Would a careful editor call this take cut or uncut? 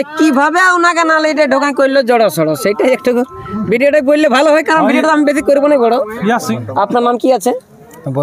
cut